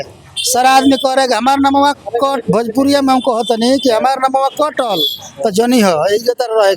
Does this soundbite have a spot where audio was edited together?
no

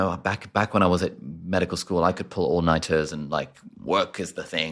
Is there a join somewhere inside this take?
no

